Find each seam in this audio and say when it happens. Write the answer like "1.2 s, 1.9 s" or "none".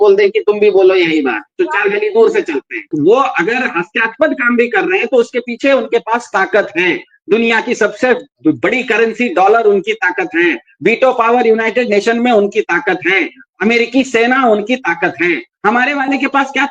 none